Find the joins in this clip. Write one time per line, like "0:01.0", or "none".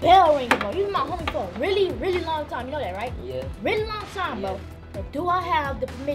none